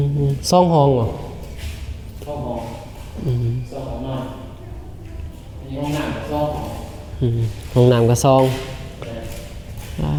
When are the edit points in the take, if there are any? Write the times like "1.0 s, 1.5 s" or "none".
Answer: none